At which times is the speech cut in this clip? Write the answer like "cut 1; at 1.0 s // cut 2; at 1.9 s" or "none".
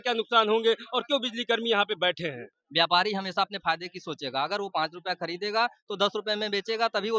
cut 1; at 2.5 s

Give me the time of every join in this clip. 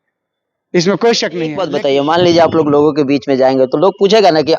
cut 1; at 1.5 s

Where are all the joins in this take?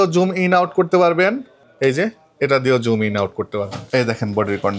cut 1; at 3.8 s

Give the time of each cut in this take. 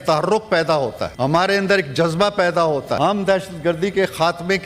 cut 1; at 1.1 s // cut 2; at 3.0 s

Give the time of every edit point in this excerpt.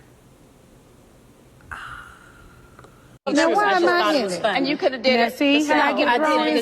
cut 1; at 3.1 s

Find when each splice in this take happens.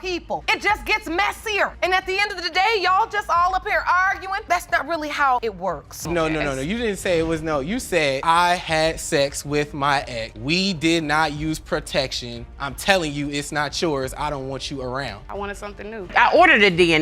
cut 1; at 6.1 s // cut 2; at 16.1 s

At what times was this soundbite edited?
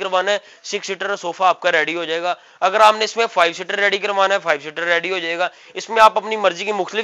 none

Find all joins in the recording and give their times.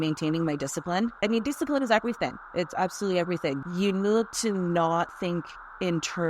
cut 1; at 1.2 s // cut 2; at 3.6 s

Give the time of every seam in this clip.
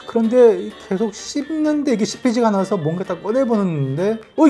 none

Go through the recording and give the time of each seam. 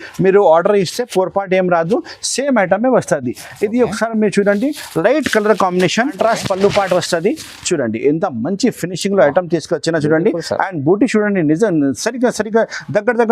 cut 1; at 6.1 s

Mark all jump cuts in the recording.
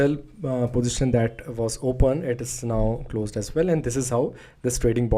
none

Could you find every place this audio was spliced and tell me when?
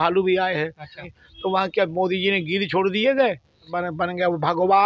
cut 1; at 1.1 s // cut 2; at 3.8 s

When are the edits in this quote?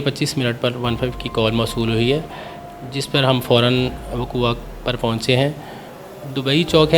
none

